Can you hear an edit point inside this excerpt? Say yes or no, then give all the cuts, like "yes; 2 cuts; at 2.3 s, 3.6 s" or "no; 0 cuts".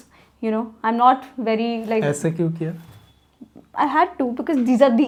no; 0 cuts